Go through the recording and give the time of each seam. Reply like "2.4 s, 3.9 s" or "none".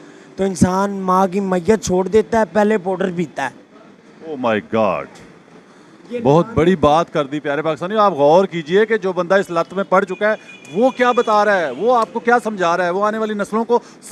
none